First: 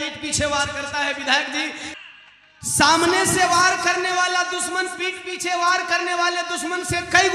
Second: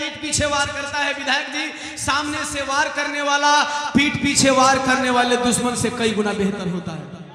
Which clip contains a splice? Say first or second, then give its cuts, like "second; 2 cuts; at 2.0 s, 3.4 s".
first; 1 cut; at 1.9 s